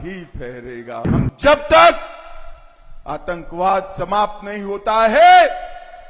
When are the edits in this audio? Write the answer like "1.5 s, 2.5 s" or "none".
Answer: 1.1 s